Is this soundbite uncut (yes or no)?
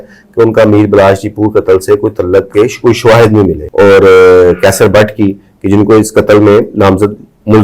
no